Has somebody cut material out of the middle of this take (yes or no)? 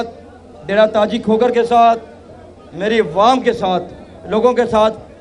no